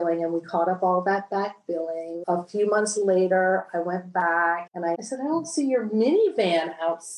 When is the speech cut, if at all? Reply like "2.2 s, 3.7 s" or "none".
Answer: 2.2 s